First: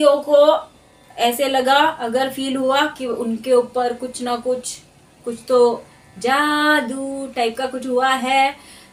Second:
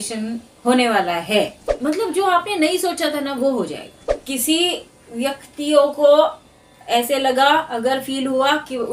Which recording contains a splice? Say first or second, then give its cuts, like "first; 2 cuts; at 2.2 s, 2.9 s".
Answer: second; 2 cuts; at 1.6 s, 4.2 s